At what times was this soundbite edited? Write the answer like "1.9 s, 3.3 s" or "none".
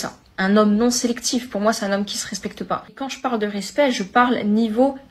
none